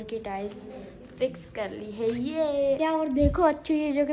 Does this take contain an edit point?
yes; 1 cut; at 2.8 s

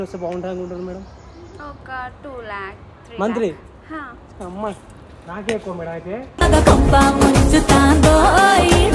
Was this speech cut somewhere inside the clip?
no; 0 cuts

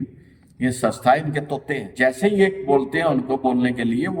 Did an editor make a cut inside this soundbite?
yes; 1 cut; at 1.8 s

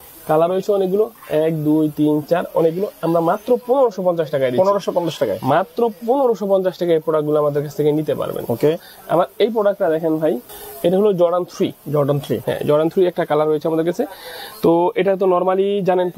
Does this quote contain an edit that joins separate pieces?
no; 0 cuts

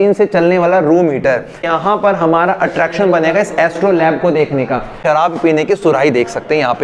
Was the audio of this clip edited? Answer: yes; 2 cuts; at 1.7 s, 5.0 s

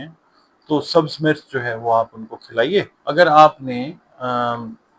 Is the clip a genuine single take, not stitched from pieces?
no; 1 cut; at 3.0 s

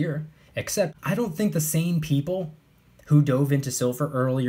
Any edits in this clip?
yes; 1 cut; at 1.0 s

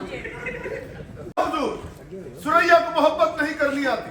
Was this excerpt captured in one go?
no; 1 cut; at 1.4 s

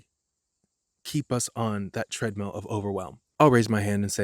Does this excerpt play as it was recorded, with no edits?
no; 1 cut; at 3.2 s

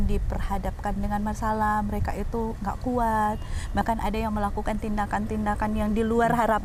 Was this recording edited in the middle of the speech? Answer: no; 0 cuts

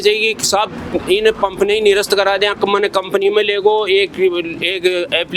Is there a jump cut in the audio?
no; 0 cuts

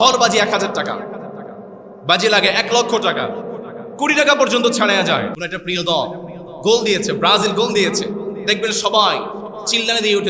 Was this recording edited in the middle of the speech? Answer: yes; 1 cut; at 5.4 s

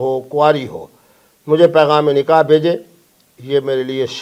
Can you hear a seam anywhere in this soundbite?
no; 0 cuts

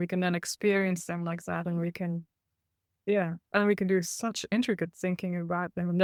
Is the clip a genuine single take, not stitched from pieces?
yes; 0 cuts

